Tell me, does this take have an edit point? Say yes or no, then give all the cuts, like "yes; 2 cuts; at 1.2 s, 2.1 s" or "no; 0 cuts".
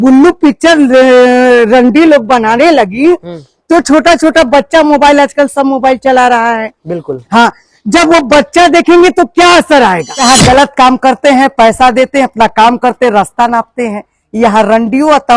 yes; 1 cut; at 10.2 s